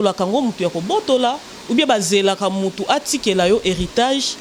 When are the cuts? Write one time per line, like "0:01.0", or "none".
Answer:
none